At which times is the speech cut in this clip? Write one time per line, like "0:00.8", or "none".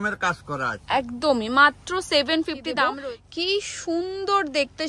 0:02.9